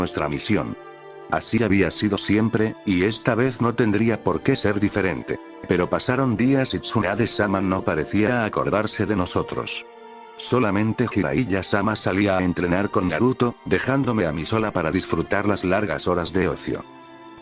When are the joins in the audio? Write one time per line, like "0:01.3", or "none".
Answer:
none